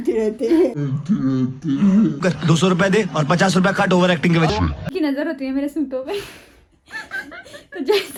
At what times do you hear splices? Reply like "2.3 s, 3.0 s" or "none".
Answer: none